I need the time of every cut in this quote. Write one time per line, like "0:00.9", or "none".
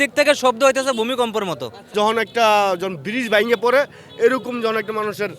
0:01.9